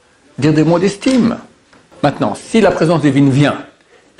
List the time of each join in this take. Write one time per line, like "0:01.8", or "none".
0:01.8